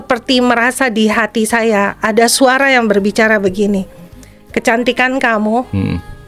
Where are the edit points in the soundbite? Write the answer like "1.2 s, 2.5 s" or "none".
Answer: none